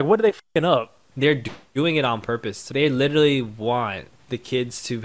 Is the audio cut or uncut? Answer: cut